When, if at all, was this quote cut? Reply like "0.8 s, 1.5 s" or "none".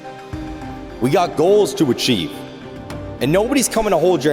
1.0 s